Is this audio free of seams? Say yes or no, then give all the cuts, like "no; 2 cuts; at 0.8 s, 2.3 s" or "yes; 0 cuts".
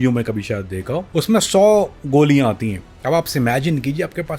no; 2 cuts; at 1.1 s, 2.0 s